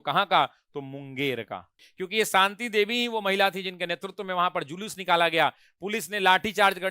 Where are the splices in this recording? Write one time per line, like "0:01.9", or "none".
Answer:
0:01.8